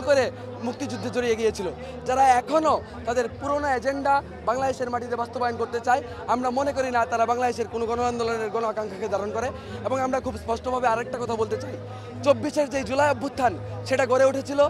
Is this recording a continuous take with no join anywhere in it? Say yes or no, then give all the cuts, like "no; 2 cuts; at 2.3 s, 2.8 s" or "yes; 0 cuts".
yes; 0 cuts